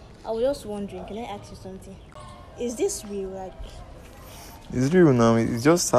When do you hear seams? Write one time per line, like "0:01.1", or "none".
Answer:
0:02.0